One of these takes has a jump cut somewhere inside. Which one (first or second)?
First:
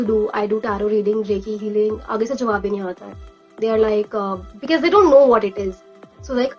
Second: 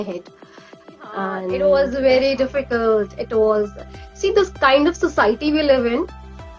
second